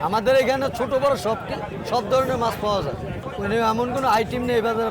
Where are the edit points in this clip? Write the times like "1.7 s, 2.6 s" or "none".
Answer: 3.2 s